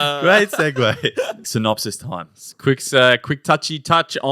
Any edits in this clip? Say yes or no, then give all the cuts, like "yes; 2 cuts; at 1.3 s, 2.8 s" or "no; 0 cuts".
yes; 1 cut; at 1.4 s